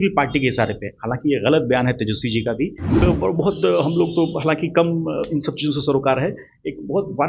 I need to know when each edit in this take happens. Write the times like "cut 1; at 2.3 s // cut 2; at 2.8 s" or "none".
cut 1; at 3.0 s